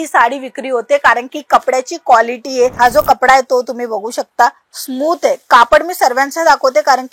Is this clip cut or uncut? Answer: cut